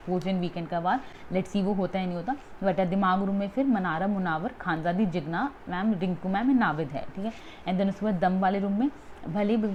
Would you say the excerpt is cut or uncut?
uncut